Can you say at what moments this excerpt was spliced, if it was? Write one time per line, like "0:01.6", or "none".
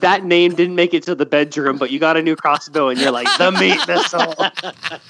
none